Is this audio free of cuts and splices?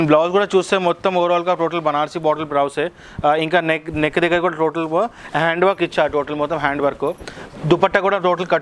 yes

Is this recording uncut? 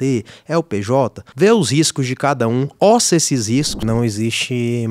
no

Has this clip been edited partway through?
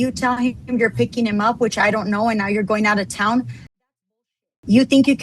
no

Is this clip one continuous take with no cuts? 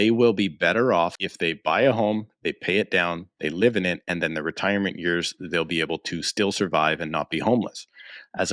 no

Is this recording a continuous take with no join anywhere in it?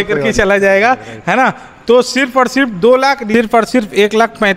no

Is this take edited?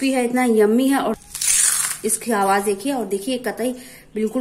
yes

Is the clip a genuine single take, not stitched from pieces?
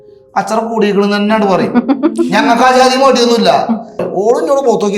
no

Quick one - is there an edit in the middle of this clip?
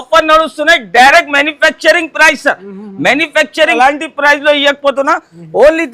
yes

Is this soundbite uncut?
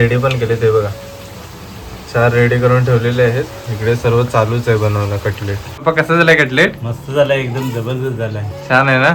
no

